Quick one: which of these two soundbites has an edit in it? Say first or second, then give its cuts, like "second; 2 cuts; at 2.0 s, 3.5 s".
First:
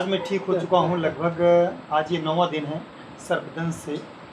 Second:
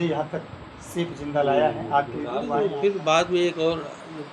second; 1 cut; at 2.5 s